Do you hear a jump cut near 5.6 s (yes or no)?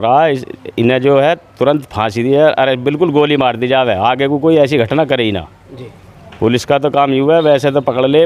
no